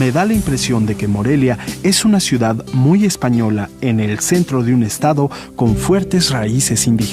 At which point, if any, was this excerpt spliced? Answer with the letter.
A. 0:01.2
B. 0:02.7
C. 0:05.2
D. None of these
B